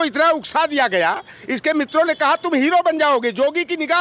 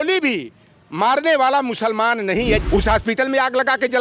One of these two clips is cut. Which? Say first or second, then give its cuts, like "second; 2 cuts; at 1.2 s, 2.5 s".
second; 1 cut; at 2.6 s